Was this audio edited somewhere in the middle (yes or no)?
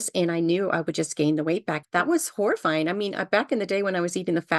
yes